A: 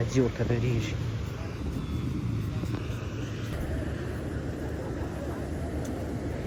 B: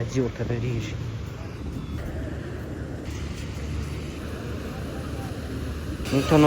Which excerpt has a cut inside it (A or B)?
B